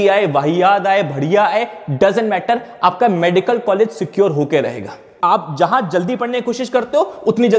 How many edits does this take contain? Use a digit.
1